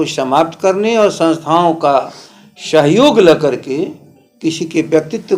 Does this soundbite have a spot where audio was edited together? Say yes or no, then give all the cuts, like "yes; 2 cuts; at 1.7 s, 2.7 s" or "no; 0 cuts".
no; 0 cuts